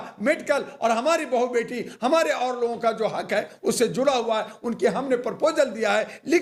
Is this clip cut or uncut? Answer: uncut